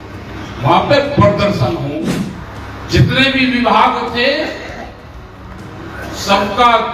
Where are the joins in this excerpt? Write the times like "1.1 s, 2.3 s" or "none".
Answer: 2.1 s